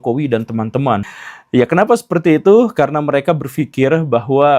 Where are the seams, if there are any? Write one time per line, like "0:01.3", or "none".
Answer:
0:01.0